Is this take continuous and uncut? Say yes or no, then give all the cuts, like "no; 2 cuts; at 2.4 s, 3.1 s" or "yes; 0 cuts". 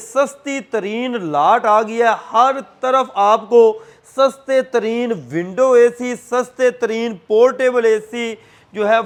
yes; 0 cuts